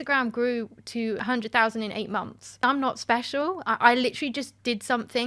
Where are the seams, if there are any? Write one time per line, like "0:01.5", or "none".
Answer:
0:01.2
0:02.6